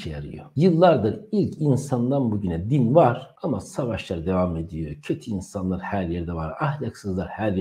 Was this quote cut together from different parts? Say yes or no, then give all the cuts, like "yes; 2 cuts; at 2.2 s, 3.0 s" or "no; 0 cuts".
no; 0 cuts